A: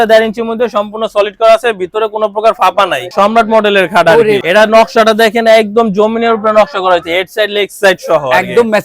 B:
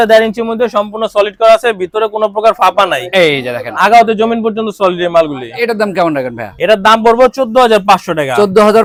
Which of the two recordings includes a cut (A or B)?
A